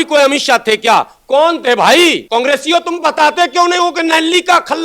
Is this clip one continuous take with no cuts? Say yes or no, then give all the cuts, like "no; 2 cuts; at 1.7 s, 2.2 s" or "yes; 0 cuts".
no; 1 cut; at 2.2 s